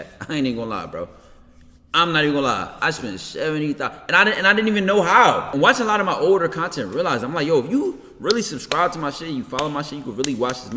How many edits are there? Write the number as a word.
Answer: one